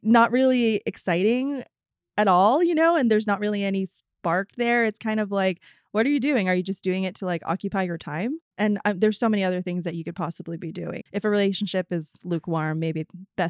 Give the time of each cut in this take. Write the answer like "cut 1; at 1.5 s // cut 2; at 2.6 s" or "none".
none